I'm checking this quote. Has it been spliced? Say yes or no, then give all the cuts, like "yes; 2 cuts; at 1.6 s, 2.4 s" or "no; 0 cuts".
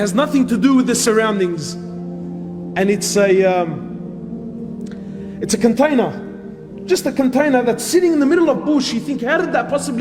no; 0 cuts